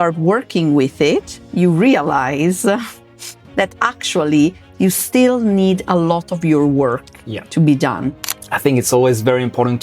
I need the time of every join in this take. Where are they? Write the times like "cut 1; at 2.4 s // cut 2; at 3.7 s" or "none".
cut 1; at 8.5 s